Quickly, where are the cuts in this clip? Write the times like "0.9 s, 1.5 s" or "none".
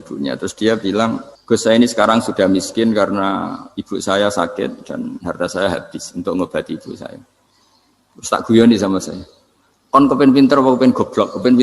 1.3 s